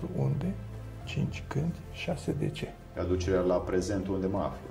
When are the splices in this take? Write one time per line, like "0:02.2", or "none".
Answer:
0:02.8